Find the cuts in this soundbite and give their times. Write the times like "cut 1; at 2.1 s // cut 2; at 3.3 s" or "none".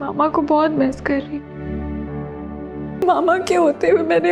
cut 1; at 3.0 s